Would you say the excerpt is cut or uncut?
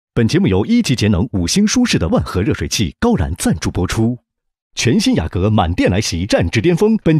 uncut